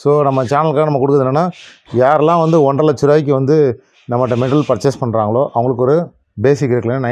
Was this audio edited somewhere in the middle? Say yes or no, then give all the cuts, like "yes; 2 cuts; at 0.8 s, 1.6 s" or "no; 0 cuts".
no; 0 cuts